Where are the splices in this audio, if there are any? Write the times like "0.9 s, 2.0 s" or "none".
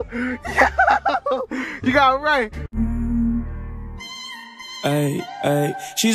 2.6 s